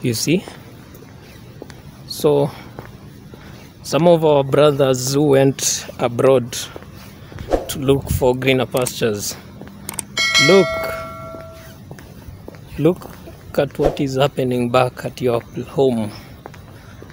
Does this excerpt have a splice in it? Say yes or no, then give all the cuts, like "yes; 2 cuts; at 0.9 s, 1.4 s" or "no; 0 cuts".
no; 0 cuts